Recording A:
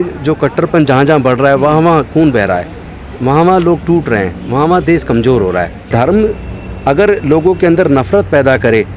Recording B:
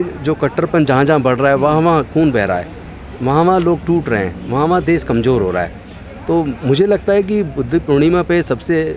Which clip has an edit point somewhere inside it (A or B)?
A